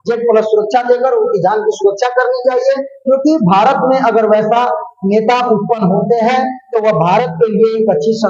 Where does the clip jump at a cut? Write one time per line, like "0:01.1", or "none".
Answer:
none